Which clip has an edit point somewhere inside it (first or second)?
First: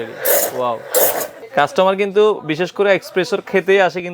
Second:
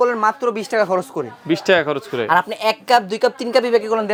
first